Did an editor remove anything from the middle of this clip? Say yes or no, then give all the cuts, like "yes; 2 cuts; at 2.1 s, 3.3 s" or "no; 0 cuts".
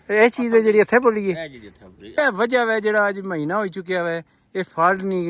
yes; 1 cut; at 2.1 s